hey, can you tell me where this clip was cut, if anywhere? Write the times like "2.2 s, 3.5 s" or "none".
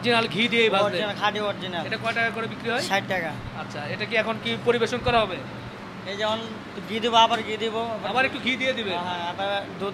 none